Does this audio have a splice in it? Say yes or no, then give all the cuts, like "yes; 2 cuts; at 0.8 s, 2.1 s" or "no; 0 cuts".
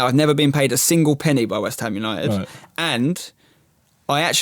no; 0 cuts